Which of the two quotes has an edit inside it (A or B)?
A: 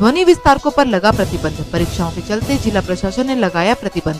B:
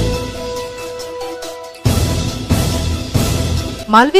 B